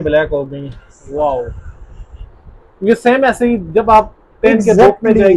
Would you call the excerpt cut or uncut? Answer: uncut